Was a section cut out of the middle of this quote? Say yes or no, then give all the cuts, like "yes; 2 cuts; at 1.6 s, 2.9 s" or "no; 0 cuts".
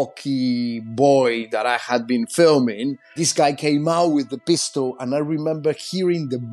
yes; 1 cut; at 3.2 s